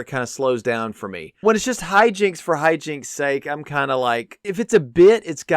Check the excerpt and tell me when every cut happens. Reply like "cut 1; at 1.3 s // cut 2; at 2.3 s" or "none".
cut 1; at 1.4 s // cut 2; at 4.4 s